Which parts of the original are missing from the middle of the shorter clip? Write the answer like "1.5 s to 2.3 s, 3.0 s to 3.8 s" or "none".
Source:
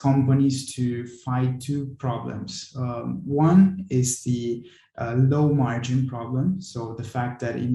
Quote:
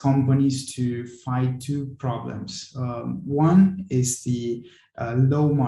none